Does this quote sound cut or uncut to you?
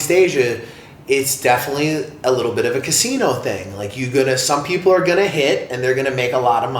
uncut